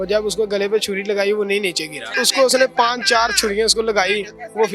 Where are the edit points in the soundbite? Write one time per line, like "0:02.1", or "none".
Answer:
0:02.2